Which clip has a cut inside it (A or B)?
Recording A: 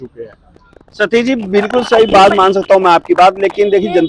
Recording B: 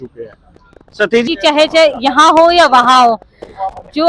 B